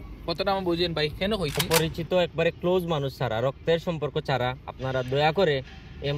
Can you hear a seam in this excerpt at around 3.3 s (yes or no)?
no